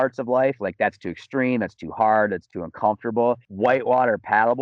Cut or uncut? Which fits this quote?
cut